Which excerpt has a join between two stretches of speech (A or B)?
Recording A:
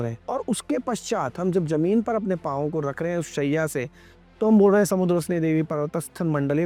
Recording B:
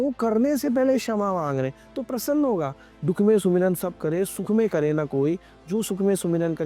B